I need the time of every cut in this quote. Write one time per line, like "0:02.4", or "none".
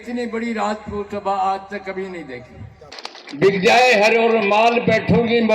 0:03.0